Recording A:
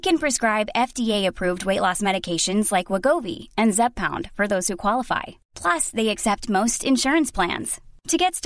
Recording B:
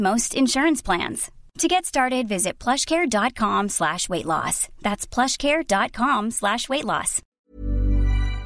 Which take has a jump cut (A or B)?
B